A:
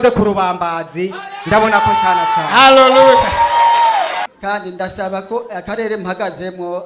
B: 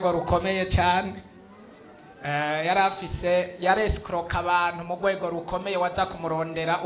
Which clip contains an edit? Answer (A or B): A